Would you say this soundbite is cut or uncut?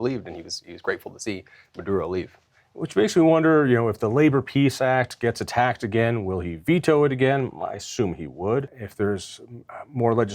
cut